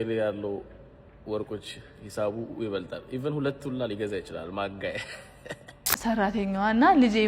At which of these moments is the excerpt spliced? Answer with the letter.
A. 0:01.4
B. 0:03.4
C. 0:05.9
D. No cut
C